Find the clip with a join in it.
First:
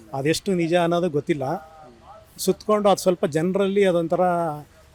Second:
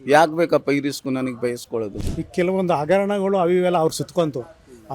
second; 1 cut; at 2.0 s

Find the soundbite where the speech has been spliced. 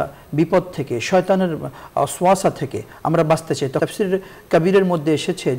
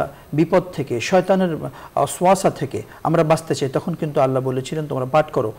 first; 1 cut; at 3.8 s

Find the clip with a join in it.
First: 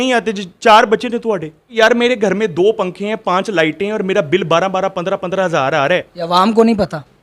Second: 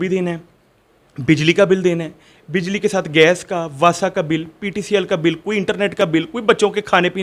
first; 2 cuts; at 1.7 s, 6.1 s

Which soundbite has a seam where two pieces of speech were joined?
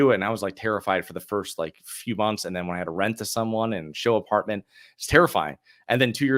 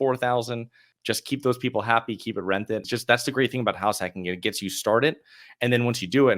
second; 2 cuts; at 0.9 s, 2.8 s

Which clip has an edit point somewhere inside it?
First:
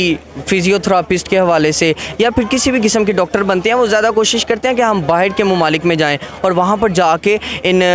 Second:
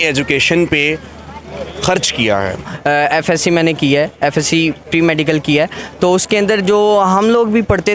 second; 1 cut; at 2.6 s

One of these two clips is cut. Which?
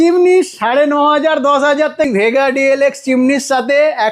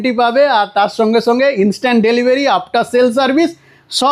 first; 1 cut; at 2.1 s

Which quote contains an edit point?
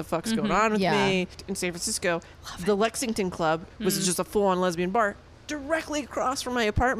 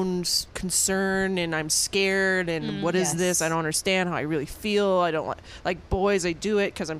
first; 2 cuts; at 1.4 s, 3.7 s

